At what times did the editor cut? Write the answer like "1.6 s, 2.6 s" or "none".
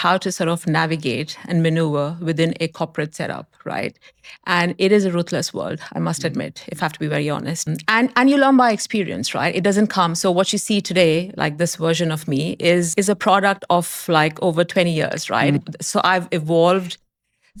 none